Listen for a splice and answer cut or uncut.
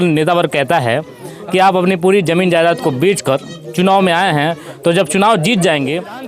uncut